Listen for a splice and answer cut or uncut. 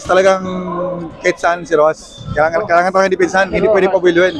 uncut